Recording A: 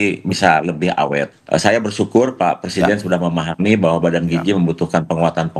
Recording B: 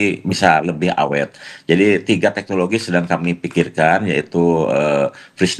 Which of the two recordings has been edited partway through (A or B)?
A